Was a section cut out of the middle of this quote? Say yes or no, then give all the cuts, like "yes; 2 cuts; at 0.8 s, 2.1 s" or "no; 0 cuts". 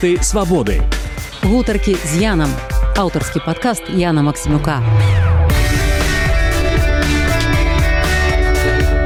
no; 0 cuts